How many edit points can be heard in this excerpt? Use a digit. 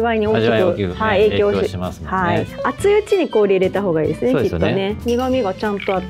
2